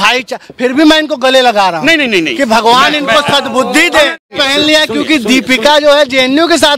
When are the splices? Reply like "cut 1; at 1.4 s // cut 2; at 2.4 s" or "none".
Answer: cut 1; at 4.3 s

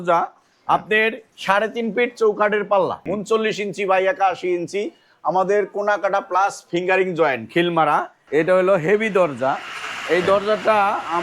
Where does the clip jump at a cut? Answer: cut 1; at 3.0 s // cut 2; at 8.2 s

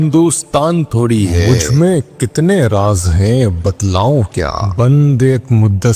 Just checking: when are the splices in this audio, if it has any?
cut 1; at 1.4 s // cut 2; at 4.6 s

